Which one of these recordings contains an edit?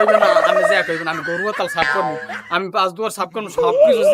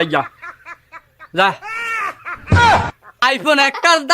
second; 1 cut; at 3.1 s

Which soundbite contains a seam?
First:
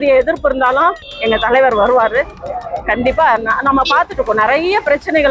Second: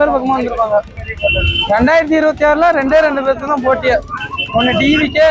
first; 1 cut; at 1.1 s

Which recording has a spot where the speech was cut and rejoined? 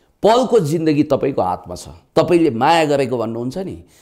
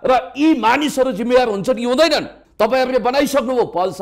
second; 1 cut; at 2.4 s

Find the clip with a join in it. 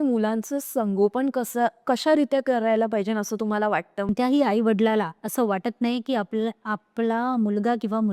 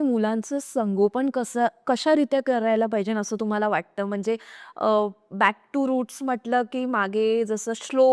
first; 1 cut; at 4.1 s

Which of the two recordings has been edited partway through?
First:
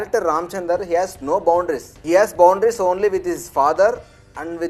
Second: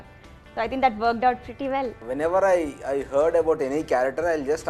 second; 1 cut; at 2.0 s

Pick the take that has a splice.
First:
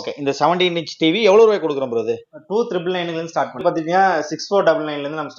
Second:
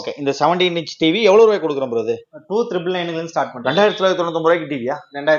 first; 1 cut; at 3.6 s

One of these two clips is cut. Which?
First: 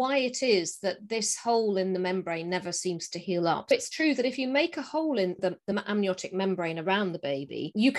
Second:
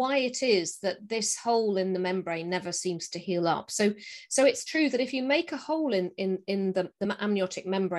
first; 2 cuts; at 3.7 s, 5.4 s

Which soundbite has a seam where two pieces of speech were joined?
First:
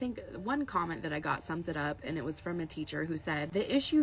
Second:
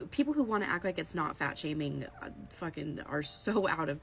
first; 1 cut; at 1.2 s

